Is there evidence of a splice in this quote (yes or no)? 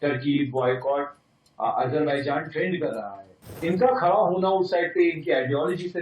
yes